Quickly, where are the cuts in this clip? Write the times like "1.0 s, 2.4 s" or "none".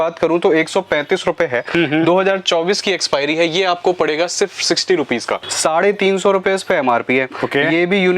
5.5 s